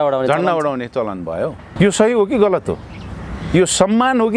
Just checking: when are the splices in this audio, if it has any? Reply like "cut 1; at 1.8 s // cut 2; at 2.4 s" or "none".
cut 1; at 1.6 s